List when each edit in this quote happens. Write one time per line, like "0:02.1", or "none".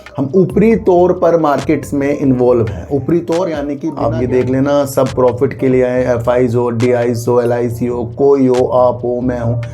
0:03.9